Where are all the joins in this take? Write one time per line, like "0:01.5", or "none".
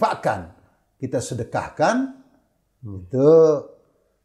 none